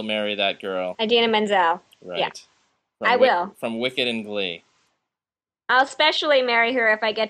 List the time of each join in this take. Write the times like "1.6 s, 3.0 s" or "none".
0.9 s

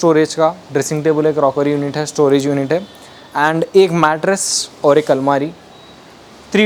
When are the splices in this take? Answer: none

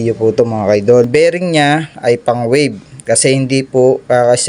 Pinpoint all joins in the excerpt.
1.1 s

